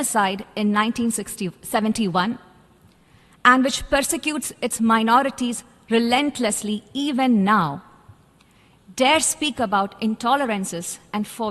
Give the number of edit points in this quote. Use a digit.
0